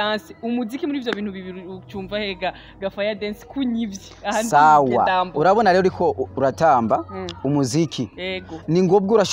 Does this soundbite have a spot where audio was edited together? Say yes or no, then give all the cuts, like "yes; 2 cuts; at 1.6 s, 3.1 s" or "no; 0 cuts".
no; 0 cuts